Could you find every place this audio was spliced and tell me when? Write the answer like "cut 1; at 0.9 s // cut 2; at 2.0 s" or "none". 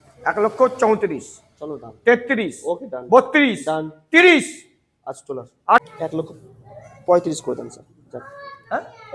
cut 1; at 5.8 s